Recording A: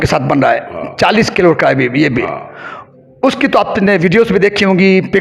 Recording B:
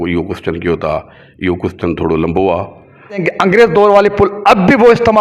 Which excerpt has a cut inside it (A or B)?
B